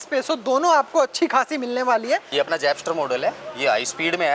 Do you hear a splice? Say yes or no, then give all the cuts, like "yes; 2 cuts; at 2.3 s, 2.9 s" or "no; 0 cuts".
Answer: yes; 1 cut; at 2.3 s